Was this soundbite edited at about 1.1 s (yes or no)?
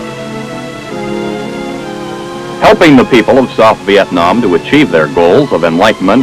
yes